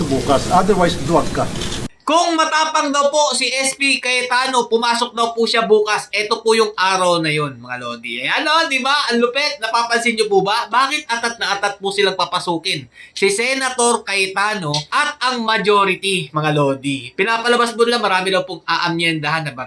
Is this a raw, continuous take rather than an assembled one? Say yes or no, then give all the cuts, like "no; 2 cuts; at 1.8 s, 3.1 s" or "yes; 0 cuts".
yes; 0 cuts